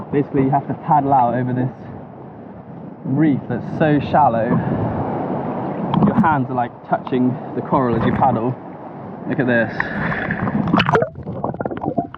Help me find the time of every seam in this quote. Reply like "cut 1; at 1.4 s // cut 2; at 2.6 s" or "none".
none